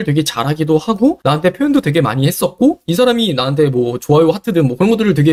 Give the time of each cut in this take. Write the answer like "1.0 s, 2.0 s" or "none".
none